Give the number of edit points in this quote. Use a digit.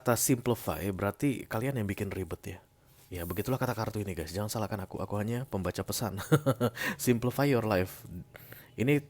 0